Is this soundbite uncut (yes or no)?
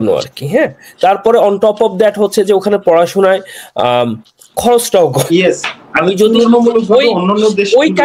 no